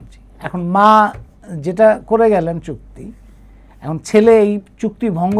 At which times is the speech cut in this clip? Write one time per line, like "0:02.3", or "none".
none